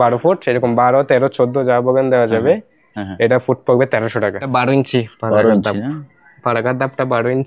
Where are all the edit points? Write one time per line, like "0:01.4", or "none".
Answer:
0:04.4